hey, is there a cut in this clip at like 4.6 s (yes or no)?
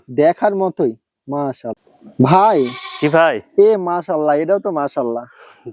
no